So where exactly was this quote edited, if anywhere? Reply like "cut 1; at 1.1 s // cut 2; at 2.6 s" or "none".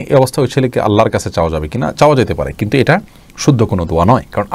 none